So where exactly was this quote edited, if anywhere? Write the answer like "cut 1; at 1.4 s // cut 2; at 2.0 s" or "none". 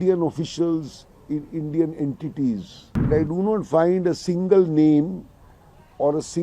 cut 1; at 3.1 s